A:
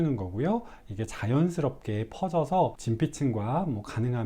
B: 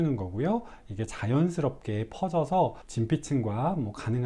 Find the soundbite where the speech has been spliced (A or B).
A